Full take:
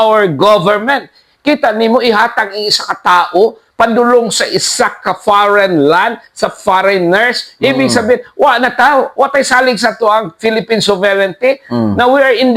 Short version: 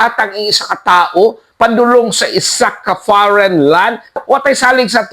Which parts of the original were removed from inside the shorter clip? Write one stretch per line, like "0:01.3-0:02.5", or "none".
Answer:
0:06.4-0:09.1